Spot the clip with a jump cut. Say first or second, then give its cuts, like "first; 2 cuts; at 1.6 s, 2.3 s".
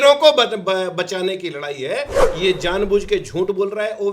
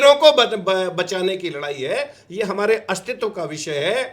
first; 1 cut; at 2.2 s